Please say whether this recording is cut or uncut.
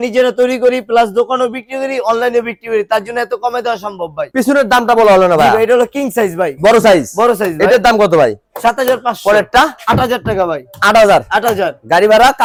uncut